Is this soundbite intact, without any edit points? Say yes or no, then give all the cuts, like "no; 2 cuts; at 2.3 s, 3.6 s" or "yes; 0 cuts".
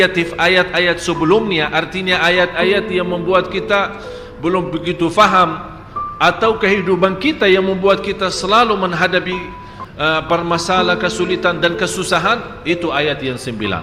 yes; 0 cuts